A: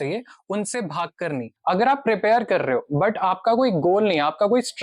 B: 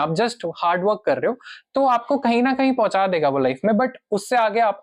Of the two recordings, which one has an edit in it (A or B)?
A